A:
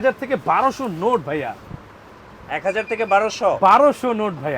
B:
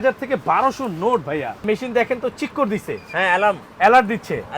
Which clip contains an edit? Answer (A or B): B